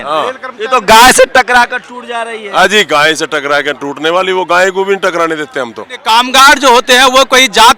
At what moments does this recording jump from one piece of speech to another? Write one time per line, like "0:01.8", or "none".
0:05.9